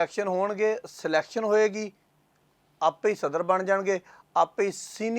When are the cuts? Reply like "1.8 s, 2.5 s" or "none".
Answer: none